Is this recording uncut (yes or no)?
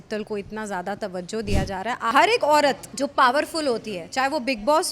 no